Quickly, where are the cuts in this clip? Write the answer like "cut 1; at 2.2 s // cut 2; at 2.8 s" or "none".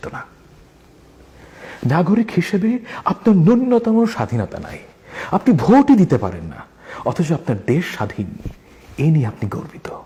none